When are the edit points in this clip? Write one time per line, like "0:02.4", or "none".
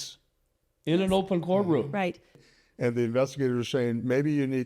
0:02.4